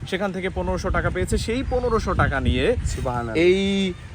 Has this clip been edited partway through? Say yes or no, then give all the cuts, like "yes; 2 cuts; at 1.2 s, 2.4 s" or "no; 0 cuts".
no; 0 cuts